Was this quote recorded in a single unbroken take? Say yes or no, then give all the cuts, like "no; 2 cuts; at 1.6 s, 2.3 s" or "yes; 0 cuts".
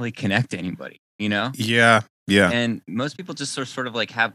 yes; 0 cuts